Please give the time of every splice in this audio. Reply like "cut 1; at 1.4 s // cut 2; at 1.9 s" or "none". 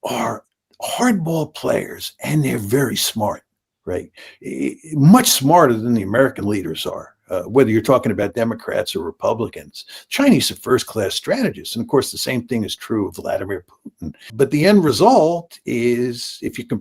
cut 1; at 14.3 s

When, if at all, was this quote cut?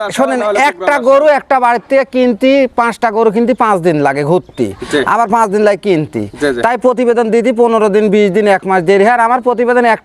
none

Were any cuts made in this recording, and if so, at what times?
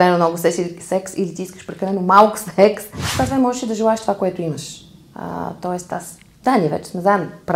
cut 1; at 2.9 s

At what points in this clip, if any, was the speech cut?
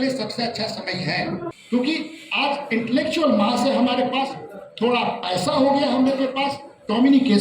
cut 1; at 1.5 s

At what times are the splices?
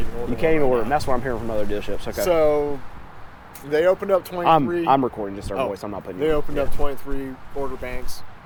none

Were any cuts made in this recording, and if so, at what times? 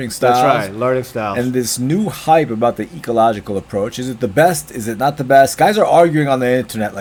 none

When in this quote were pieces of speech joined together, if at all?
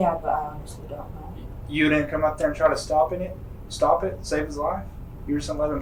none

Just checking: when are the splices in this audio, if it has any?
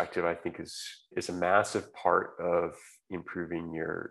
cut 1; at 1.1 s

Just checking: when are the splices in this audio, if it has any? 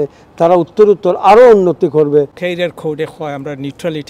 cut 1; at 2.4 s

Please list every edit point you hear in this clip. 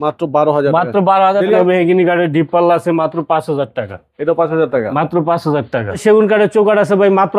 cut 1; at 1.6 s // cut 2; at 6.0 s

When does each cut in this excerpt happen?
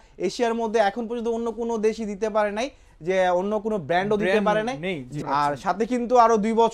cut 1; at 5.2 s

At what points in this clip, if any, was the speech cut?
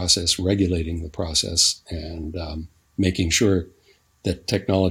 none

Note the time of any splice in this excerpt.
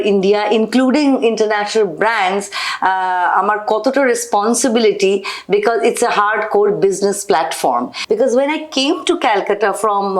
cut 1; at 7.9 s

